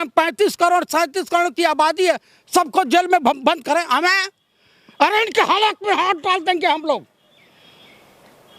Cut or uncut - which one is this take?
uncut